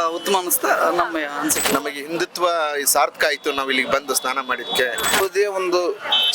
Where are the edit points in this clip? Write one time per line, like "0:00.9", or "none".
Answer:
0:01.7
0:05.2